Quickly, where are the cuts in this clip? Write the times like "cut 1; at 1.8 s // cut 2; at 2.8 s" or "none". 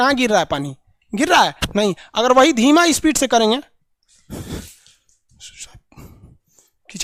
none